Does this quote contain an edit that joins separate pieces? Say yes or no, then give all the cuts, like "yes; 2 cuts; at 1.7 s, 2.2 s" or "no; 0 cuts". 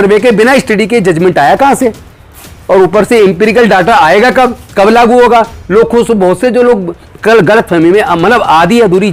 no; 0 cuts